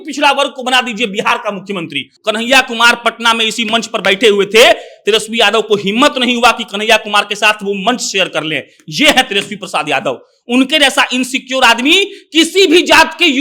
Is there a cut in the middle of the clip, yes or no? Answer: yes